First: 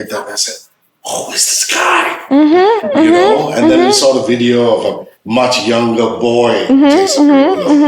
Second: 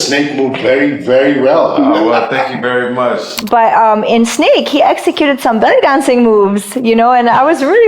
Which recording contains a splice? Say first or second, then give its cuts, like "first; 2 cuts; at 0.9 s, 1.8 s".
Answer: second; 1 cut; at 3.3 s